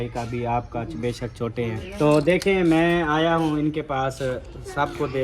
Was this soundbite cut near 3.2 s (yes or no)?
no